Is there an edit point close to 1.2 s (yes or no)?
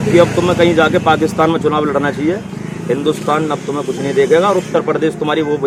no